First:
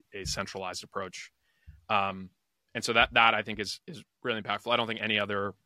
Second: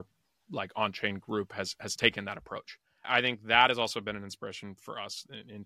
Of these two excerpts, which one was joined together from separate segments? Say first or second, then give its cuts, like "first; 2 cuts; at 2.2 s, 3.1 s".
second; 1 cut; at 3.1 s